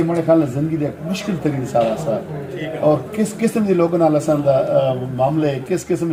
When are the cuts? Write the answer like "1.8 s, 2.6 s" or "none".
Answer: none